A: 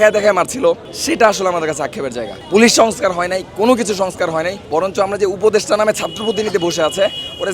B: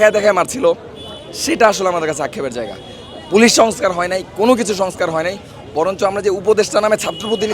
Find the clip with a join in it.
A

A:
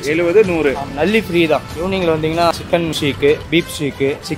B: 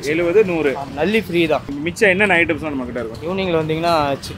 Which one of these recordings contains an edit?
A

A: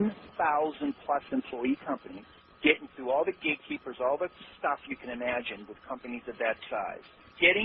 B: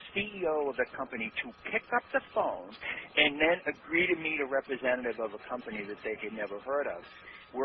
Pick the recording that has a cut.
B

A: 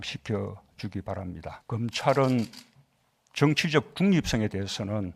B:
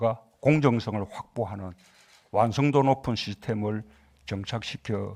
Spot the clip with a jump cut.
A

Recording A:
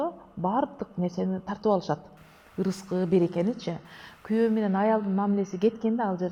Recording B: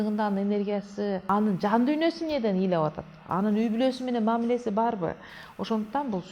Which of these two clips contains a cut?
B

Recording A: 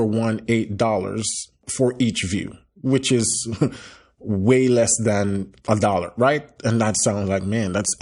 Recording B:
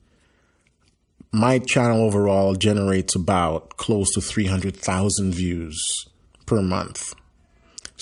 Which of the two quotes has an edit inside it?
A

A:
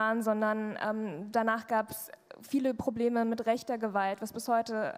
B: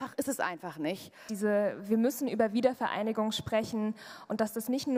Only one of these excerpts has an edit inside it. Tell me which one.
B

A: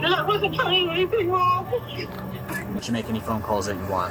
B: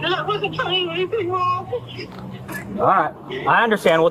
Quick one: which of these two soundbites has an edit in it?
A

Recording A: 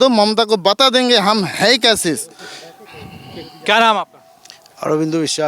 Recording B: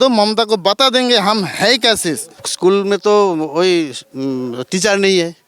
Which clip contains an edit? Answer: B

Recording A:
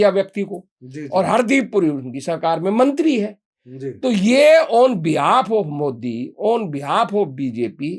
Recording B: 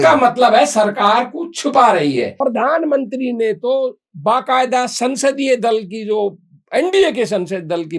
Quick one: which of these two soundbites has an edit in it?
B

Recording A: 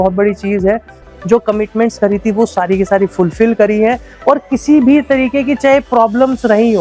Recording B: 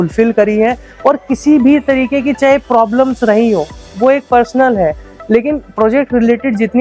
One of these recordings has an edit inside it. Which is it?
A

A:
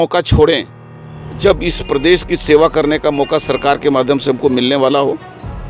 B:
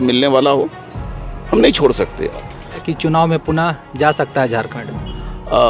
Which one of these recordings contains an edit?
B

